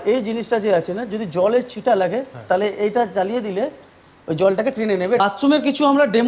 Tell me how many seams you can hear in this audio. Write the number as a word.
one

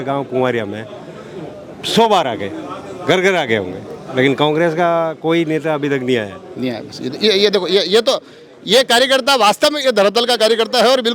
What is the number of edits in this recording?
zero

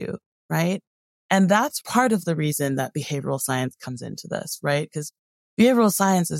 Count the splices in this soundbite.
one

